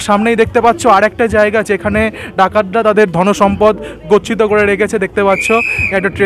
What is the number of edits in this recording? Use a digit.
0